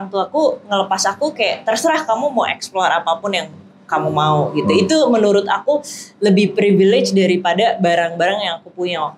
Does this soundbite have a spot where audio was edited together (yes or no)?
no